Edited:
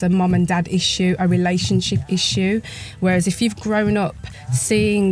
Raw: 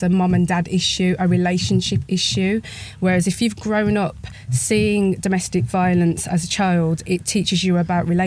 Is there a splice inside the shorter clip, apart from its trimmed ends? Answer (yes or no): no